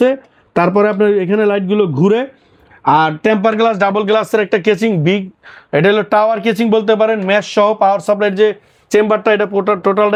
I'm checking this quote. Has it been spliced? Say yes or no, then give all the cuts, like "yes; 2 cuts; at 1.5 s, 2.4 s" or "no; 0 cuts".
no; 0 cuts